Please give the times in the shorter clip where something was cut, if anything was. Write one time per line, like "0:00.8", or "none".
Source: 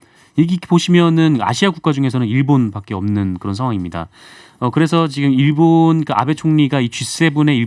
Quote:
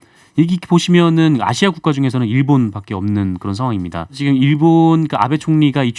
0:04.2